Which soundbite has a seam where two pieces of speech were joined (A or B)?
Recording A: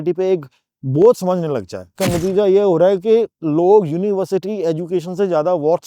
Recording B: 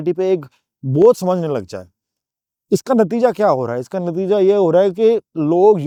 A